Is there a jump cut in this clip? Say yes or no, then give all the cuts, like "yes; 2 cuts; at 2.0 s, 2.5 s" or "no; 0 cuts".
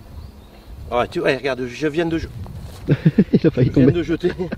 no; 0 cuts